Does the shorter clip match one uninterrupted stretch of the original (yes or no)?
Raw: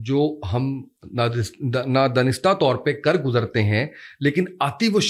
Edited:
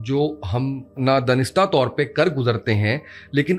no